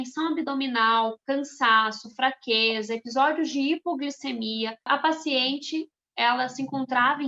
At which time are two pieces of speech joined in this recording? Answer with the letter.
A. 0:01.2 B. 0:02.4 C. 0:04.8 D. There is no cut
C